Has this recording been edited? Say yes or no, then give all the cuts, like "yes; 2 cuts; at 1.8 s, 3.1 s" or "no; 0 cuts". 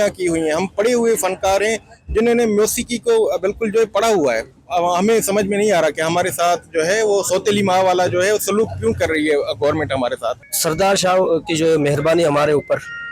yes; 2 cuts; at 4.5 s, 10.4 s